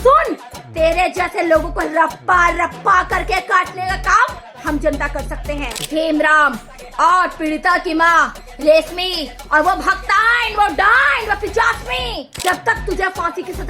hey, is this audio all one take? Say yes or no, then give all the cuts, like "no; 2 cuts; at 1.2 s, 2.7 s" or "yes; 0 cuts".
no; 2 cuts; at 5.7 s, 12.3 s